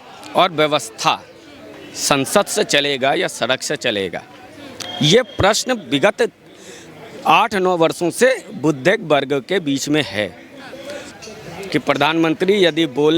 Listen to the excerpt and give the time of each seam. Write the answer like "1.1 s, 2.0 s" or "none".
11.1 s